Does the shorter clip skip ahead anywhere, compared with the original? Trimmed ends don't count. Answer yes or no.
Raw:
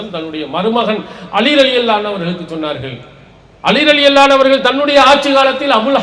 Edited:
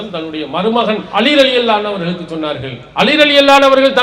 yes